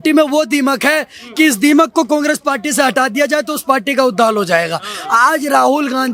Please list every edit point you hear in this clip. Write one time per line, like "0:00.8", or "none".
none